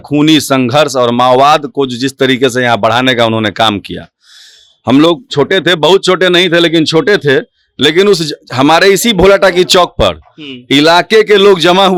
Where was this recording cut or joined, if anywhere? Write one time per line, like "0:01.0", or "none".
none